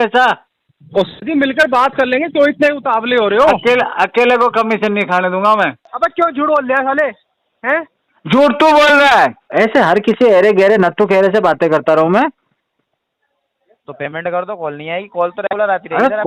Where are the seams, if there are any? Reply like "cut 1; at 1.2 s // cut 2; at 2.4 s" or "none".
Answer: cut 1; at 5.8 s // cut 2; at 9.4 s

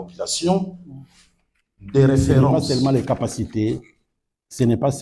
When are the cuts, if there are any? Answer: cut 1; at 2.5 s

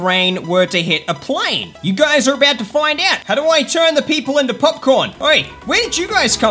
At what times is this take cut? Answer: cut 1; at 3.2 s // cut 2; at 5.1 s

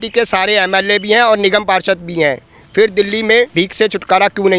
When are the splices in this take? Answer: none

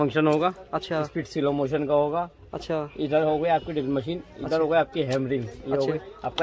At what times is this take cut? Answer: none

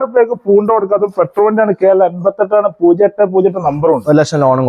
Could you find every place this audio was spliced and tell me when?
none

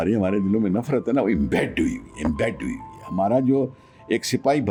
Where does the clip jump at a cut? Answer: none

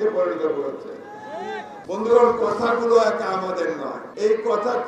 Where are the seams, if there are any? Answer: cut 1; at 1.8 s // cut 2; at 4.0 s

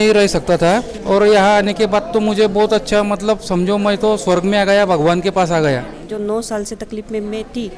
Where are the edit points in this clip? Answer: cut 1; at 0.9 s // cut 2; at 6.0 s

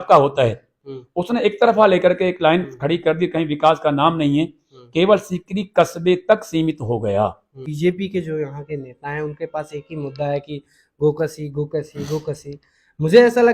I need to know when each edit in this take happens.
cut 1; at 7.6 s

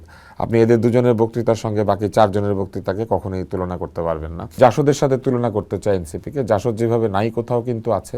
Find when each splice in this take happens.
cut 1; at 4.6 s

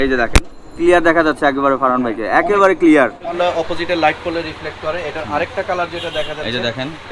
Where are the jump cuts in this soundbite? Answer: cut 1; at 3.3 s

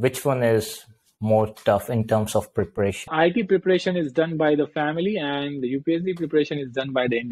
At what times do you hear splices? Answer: cut 1; at 3.1 s

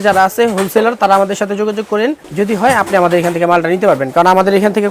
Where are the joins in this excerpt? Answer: none

